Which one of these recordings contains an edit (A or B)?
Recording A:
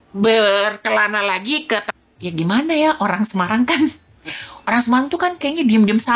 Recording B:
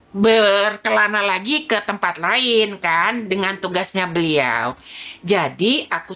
A